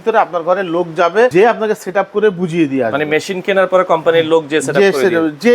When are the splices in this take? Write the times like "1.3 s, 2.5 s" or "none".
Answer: 1.3 s